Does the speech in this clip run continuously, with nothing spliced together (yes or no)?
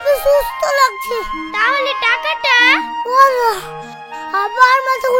yes